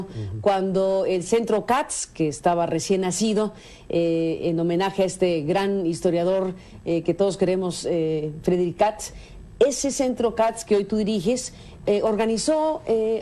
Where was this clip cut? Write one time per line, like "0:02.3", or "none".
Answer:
none